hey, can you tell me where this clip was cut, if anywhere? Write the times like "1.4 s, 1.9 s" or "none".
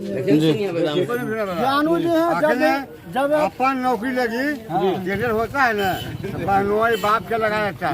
1.1 s